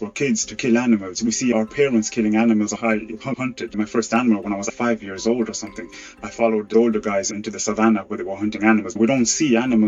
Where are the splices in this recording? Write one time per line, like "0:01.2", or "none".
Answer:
0:03.3